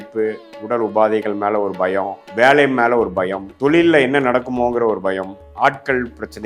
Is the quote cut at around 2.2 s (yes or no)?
yes